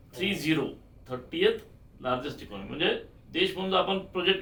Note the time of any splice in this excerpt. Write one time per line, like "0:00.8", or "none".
none